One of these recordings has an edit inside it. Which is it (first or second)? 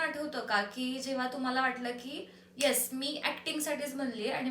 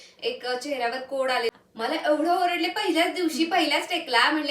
second